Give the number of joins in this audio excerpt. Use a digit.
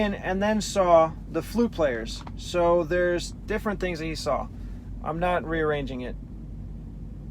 1